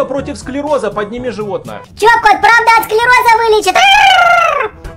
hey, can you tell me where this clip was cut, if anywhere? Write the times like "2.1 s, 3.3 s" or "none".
none